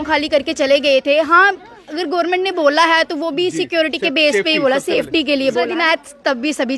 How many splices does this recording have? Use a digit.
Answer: 1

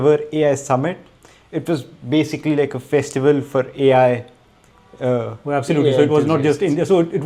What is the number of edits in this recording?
0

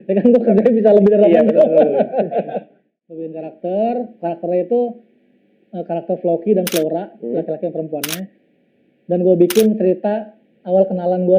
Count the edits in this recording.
1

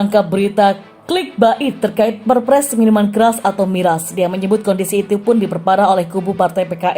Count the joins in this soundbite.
1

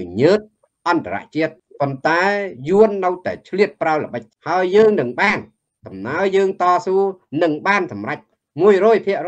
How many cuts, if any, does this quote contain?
2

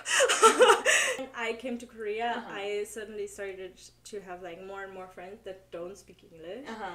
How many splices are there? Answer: 1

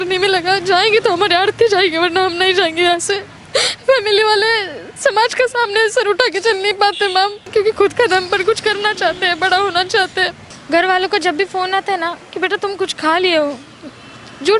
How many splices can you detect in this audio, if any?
3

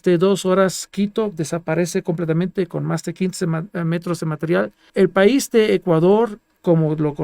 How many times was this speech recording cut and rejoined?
1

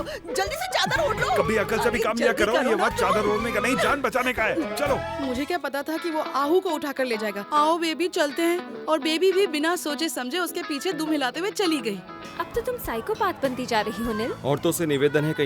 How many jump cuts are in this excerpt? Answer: 2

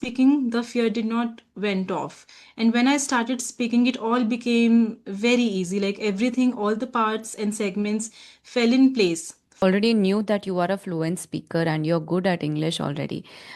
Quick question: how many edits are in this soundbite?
1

